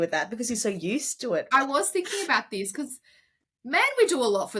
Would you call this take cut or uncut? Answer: cut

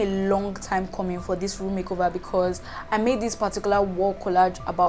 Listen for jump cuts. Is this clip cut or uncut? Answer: uncut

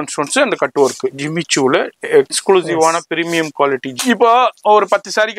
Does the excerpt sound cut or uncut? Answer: cut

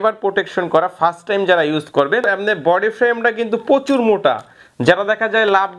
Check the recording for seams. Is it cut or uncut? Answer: cut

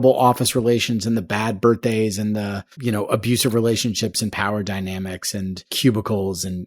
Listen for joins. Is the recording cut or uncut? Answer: cut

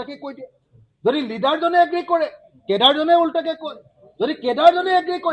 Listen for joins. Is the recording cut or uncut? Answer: uncut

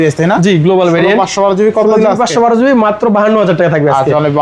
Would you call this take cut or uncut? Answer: uncut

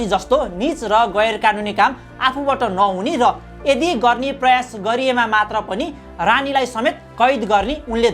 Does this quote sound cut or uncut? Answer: uncut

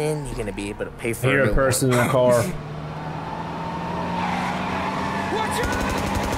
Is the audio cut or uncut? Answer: uncut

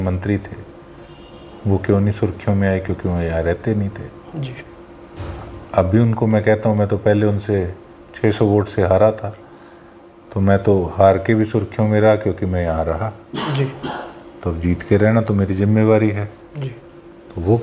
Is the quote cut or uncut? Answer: uncut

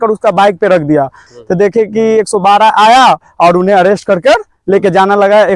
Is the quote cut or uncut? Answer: cut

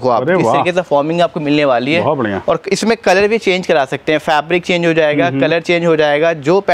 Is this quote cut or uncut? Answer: uncut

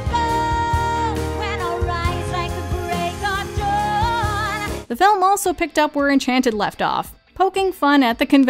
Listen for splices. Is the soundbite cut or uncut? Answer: uncut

